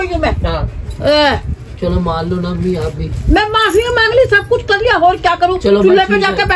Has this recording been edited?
no; 0 cuts

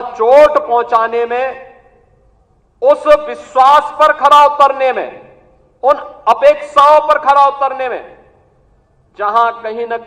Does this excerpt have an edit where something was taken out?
no; 0 cuts

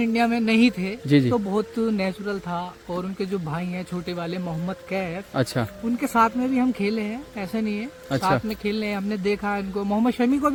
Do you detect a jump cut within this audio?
no; 0 cuts

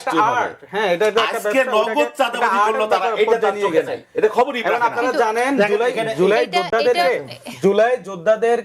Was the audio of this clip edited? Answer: no; 0 cuts

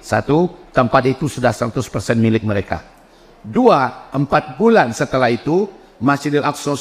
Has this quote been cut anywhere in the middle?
no; 0 cuts

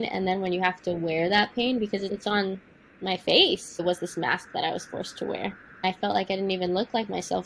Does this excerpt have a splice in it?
yes; 2 cuts; at 3.8 s, 5.8 s

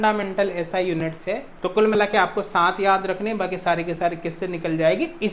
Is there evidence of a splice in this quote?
yes; 1 cut; at 1.5 s

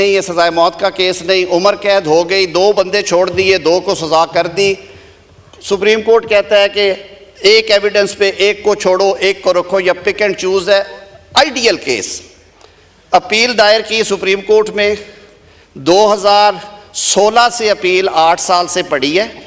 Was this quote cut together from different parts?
no; 0 cuts

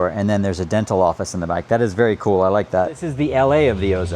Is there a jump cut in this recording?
yes; 1 cut; at 3.1 s

